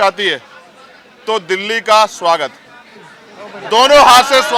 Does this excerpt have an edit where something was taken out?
no; 0 cuts

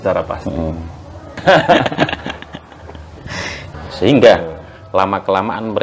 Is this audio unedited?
no; 2 cuts; at 1.4 s, 3.7 s

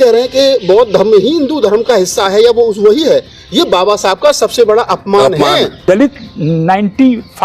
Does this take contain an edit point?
yes; 1 cut; at 5.8 s

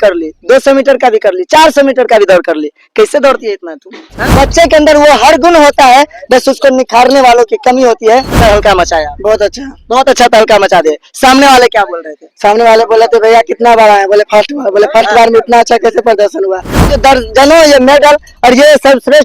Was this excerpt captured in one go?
no; 3 cuts; at 4.3 s, 8.4 s, 16.9 s

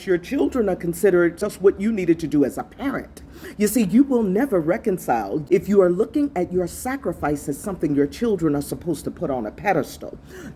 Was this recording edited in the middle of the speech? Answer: yes; 2 cuts; at 1.5 s, 5.4 s

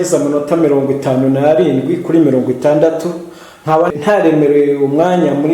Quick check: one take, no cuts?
no; 1 cut; at 4.0 s

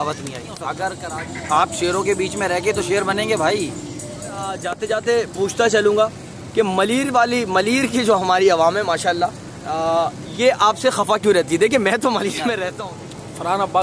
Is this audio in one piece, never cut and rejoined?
no; 3 cuts; at 1.1 s, 4.7 s, 12.7 s

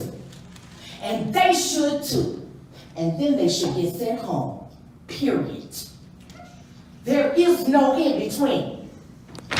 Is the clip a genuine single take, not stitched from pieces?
yes; 0 cuts

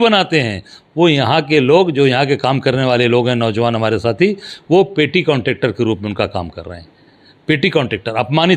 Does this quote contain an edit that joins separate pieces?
no; 0 cuts

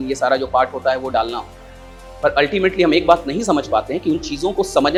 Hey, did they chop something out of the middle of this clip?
no; 0 cuts

